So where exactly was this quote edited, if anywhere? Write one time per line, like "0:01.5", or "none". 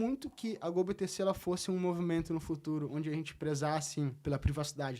0:03.3
0:04.2